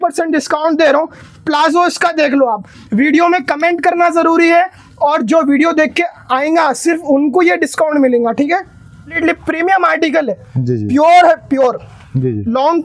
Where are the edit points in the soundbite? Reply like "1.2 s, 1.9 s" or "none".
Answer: 9.2 s